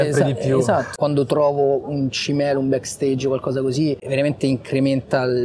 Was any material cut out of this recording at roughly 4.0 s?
yes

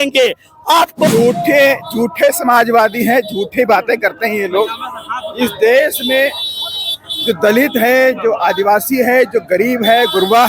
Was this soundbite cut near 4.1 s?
no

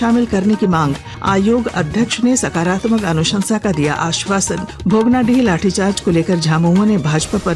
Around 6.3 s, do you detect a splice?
no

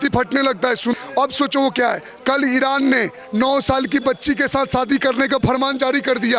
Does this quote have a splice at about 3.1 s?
no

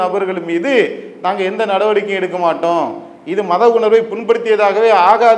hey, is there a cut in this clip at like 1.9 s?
no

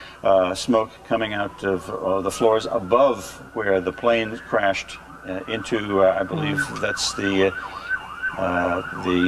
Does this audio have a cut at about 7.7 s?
yes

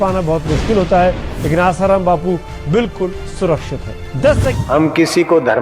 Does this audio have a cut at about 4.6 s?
yes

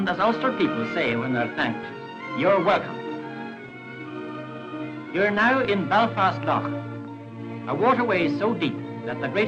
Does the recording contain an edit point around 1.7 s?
no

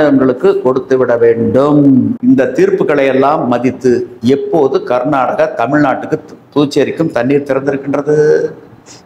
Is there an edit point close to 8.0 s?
no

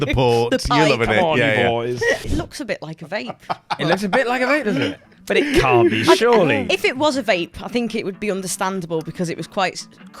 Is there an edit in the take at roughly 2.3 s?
yes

